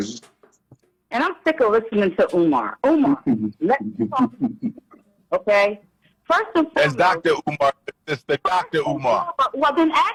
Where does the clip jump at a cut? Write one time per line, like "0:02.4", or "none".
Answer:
none